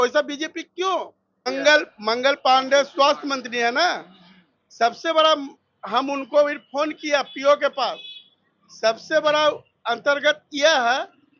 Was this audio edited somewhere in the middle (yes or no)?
yes